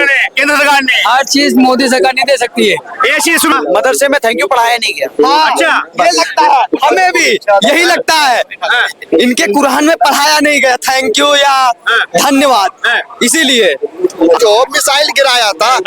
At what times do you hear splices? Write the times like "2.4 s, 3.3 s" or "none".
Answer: 3.5 s, 14.4 s